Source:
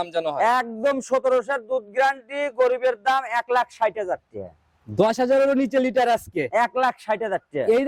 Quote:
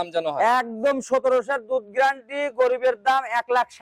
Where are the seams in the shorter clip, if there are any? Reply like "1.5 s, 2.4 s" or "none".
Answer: none